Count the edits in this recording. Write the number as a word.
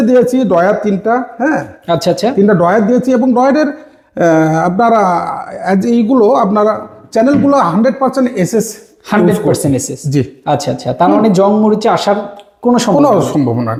zero